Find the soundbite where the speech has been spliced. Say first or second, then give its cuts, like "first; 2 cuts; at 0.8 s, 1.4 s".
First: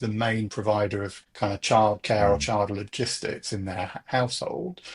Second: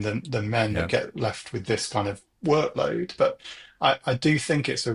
first; 1 cut; at 1.2 s